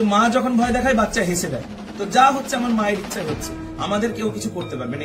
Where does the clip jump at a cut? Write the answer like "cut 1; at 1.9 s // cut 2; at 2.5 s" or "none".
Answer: none